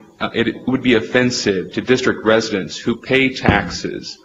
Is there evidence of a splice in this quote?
no; 0 cuts

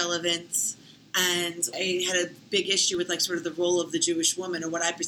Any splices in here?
yes; 1 cut; at 1.7 s

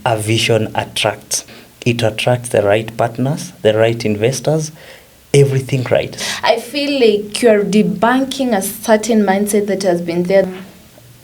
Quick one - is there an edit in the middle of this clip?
yes; 3 cuts; at 1.5 s, 6.2 s, 10.5 s

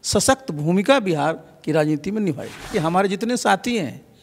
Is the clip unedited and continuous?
no; 1 cut; at 2.7 s

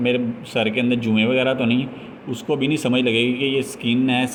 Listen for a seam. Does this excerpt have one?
no; 0 cuts

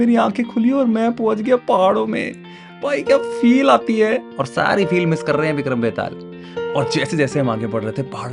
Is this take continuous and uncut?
yes; 0 cuts

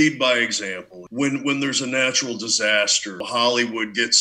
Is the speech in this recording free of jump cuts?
no; 2 cuts; at 1.0 s, 3.2 s

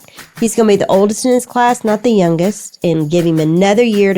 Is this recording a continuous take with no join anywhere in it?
no; 1 cut; at 2.7 s

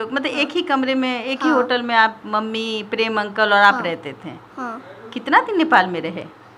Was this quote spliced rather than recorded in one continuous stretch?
no; 0 cuts

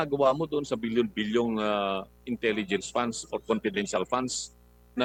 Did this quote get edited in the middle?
no; 0 cuts

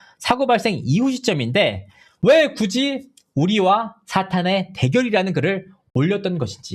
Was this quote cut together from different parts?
no; 0 cuts

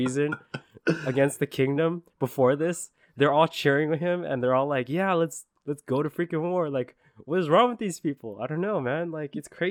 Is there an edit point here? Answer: no; 0 cuts

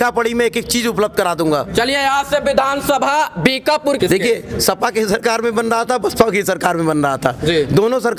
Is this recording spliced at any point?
yes; 1 cut; at 4.0 s

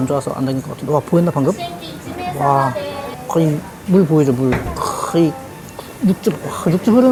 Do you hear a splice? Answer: no; 0 cuts

